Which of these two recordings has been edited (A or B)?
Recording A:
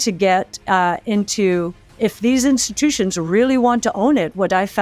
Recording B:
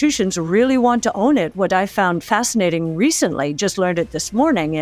A